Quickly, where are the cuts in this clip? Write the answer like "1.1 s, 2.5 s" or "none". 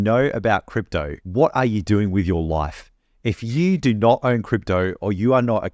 1.2 s